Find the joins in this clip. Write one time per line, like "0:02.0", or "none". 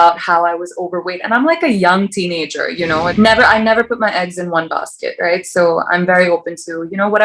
0:03.1